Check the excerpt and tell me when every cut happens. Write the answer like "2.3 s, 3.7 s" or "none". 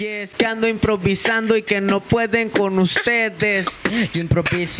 3.7 s